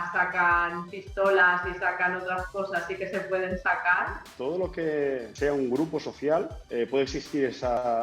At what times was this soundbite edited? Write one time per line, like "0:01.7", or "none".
0:04.3
0:05.3
0:06.6